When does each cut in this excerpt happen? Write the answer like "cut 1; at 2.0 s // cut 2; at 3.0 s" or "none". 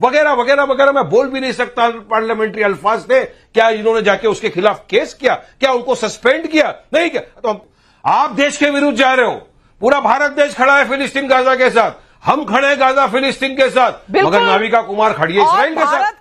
cut 1; at 7.6 s